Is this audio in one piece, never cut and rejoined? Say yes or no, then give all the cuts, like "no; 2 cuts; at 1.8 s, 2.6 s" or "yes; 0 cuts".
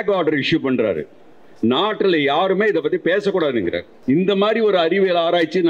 no; 1 cut; at 3.9 s